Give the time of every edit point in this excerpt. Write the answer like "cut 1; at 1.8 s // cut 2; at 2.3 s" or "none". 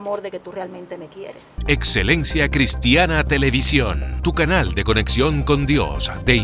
cut 1; at 1.5 s